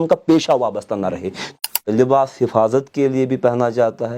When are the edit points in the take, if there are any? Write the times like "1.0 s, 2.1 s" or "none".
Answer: 1.5 s